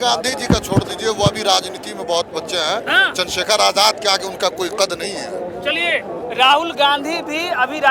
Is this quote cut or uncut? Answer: uncut